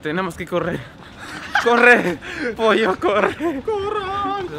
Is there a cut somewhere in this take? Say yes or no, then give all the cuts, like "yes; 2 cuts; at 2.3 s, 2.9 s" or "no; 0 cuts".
no; 0 cuts